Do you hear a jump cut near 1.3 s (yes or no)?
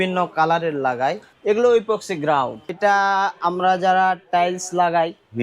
yes